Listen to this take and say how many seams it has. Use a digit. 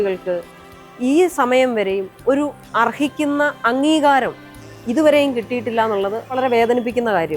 1